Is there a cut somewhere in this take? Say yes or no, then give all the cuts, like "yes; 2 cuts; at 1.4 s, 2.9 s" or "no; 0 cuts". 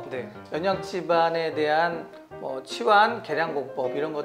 no; 0 cuts